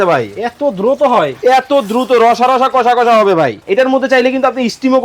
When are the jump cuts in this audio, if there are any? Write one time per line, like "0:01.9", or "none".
0:03.6